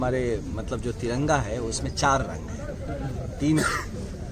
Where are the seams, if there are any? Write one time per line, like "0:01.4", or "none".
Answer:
none